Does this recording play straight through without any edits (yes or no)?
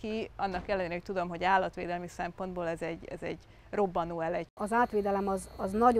no